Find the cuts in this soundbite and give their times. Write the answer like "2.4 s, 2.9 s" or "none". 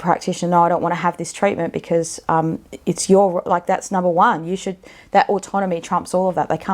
none